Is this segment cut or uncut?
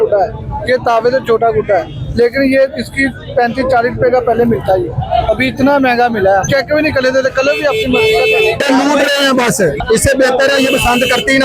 cut